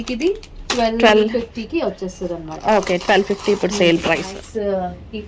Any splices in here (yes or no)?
yes